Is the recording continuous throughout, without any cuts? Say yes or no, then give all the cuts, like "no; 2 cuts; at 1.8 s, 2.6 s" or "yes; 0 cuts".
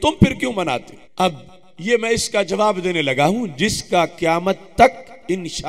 no; 1 cut; at 1.0 s